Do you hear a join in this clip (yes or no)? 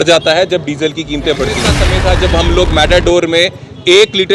yes